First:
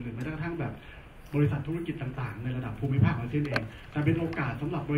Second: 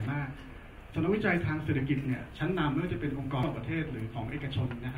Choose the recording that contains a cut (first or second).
second